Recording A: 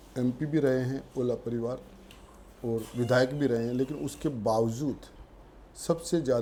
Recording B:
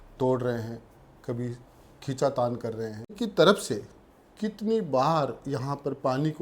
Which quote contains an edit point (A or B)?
B